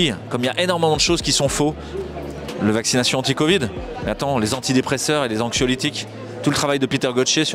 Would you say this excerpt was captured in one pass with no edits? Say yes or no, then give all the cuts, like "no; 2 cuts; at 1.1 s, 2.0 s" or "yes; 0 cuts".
yes; 0 cuts